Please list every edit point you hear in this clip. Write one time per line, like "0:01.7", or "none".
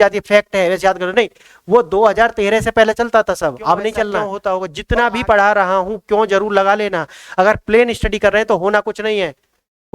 0:04.3